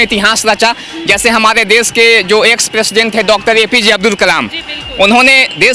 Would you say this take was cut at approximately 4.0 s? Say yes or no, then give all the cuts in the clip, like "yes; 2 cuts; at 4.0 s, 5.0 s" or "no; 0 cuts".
no; 0 cuts